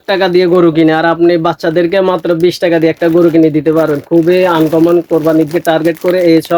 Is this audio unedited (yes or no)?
yes